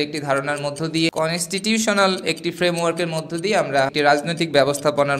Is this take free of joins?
no; 2 cuts; at 1.1 s, 3.9 s

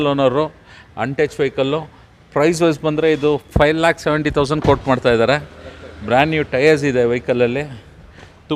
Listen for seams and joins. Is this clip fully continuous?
yes; 0 cuts

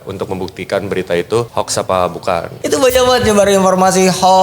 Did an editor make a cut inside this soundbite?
yes; 2 cuts; at 1.5 s, 2.5 s

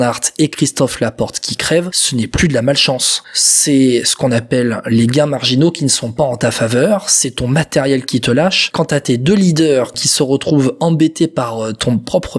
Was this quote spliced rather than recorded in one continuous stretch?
yes; 1 cut; at 2.0 s

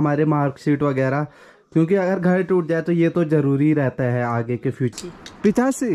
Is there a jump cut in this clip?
yes; 1 cut; at 4.9 s

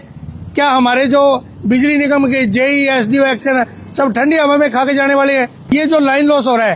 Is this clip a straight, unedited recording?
no; 1 cut; at 5.8 s

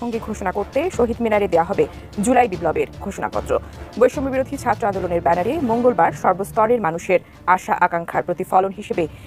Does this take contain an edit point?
no; 0 cuts

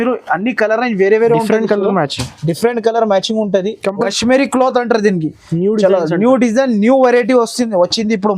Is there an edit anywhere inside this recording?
yes; 1 cut; at 4.0 s

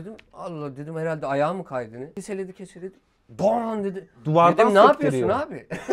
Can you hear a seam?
yes; 1 cut; at 2.1 s

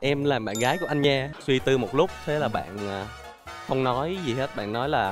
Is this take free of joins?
no; 1 cut; at 1.1 s

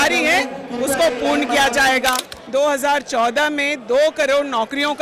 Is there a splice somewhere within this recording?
yes; 1 cut; at 2.3 s

